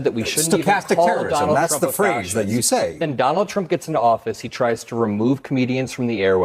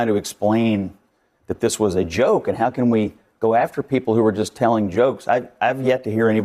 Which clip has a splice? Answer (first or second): first